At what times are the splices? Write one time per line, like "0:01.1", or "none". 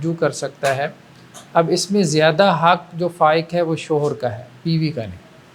none